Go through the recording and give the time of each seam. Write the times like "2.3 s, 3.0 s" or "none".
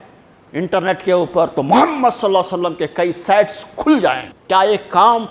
4.3 s